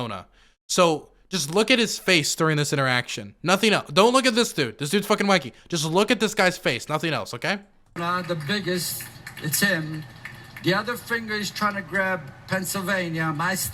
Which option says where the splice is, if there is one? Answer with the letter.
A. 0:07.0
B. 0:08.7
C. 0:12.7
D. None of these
D